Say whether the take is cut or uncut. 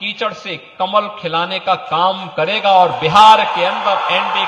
uncut